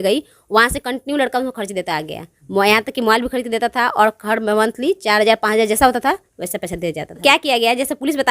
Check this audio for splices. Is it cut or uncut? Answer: cut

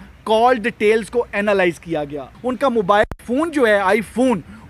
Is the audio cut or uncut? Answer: cut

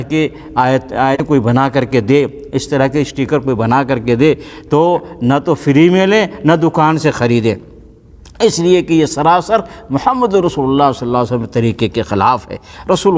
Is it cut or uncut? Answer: cut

